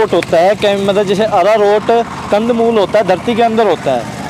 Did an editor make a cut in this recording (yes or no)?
no